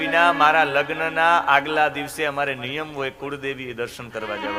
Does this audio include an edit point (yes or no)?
no